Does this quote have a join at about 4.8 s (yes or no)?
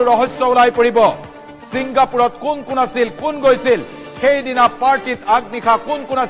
yes